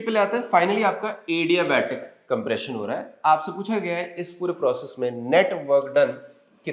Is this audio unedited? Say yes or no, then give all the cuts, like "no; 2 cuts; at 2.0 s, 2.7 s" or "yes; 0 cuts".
yes; 0 cuts